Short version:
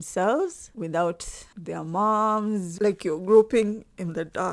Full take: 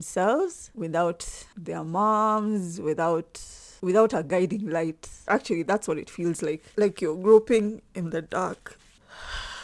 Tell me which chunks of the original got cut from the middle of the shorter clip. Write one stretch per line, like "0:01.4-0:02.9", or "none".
0:02.7-0:06.7